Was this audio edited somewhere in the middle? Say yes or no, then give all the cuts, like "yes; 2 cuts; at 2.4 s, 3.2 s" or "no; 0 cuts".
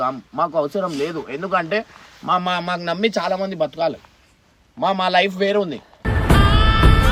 no; 0 cuts